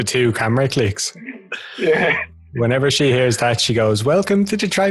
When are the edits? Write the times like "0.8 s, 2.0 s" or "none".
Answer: none